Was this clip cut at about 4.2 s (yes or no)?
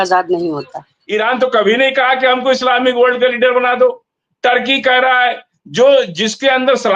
no